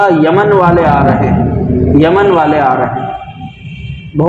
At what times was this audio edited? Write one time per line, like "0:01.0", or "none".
0:01.2